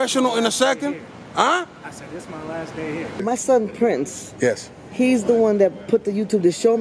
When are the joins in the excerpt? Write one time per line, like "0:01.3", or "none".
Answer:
0:03.2